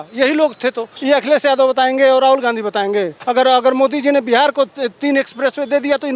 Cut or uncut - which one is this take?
cut